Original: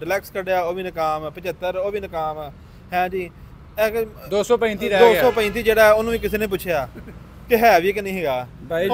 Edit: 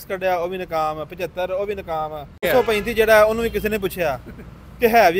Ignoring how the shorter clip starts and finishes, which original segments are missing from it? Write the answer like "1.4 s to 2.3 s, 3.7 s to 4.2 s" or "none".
2.7 s to 5.2 s